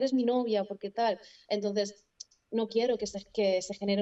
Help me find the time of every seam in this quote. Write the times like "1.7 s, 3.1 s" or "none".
none